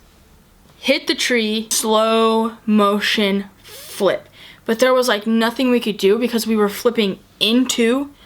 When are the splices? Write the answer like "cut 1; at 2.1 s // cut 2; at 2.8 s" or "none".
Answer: cut 1; at 1.7 s